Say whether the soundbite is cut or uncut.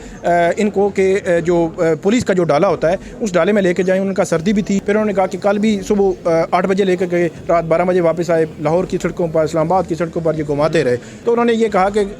cut